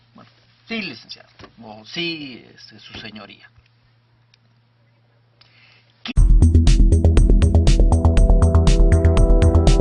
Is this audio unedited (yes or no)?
yes